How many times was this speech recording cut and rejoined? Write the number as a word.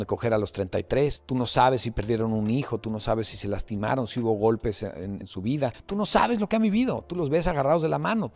two